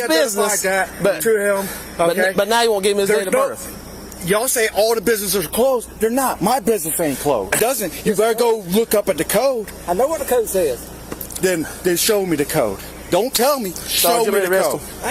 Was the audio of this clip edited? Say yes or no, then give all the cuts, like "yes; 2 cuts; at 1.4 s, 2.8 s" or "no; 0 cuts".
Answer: yes; 1 cut; at 7.6 s